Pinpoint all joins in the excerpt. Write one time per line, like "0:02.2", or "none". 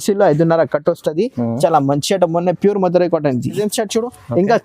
0:03.6